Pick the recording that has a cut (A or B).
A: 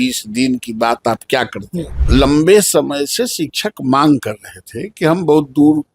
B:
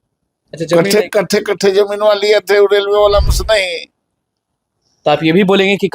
A